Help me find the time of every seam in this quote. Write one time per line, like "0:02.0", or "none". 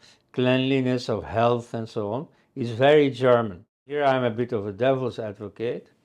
0:04.0